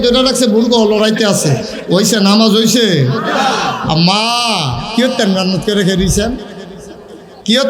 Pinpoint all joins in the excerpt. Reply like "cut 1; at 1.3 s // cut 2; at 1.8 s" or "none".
none